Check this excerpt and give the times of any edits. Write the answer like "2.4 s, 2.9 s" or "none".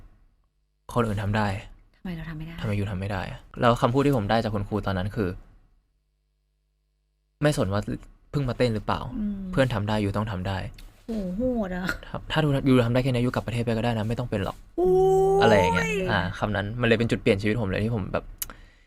none